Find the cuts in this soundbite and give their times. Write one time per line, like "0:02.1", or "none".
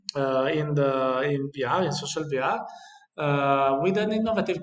none